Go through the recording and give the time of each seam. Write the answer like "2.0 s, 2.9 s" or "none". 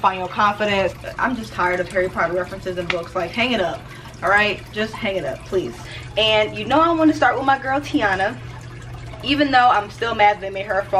1.0 s, 5.9 s